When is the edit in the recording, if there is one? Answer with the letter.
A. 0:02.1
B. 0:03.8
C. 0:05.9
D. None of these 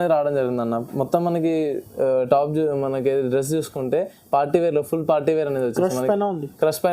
D